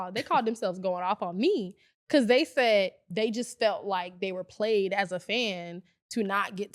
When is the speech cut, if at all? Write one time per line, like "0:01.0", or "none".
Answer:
none